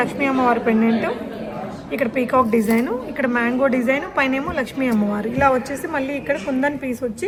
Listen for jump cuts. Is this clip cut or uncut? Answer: uncut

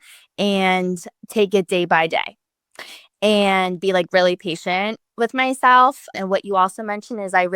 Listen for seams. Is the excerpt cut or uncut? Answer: cut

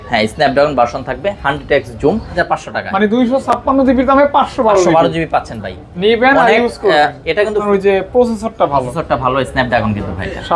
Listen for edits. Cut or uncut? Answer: cut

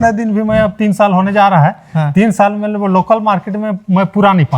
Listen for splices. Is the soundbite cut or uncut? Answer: uncut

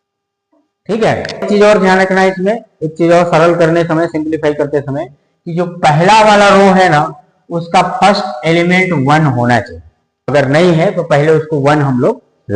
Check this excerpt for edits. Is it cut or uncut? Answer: cut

